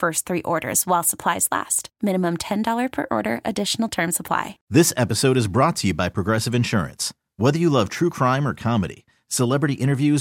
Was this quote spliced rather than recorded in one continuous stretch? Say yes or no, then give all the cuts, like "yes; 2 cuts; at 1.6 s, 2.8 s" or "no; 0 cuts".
yes; 1 cut; at 4.6 s